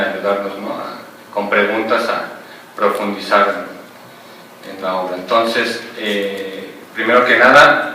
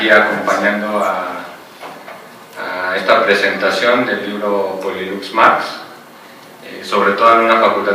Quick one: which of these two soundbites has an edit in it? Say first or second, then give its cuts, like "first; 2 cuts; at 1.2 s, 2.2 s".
first; 1 cut; at 3.7 s